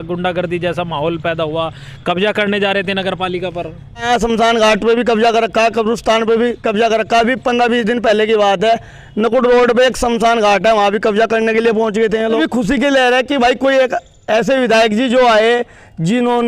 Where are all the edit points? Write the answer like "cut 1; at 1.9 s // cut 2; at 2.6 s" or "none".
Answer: cut 1; at 4.0 s // cut 2; at 12.4 s